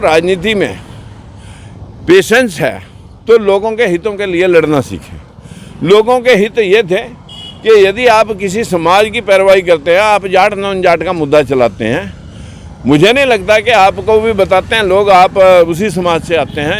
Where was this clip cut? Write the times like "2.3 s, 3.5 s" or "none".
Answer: none

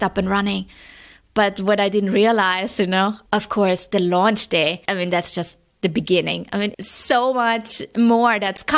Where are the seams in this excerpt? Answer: 3.2 s, 4.8 s, 6.7 s

